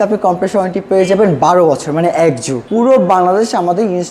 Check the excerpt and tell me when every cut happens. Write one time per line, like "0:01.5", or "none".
0:02.5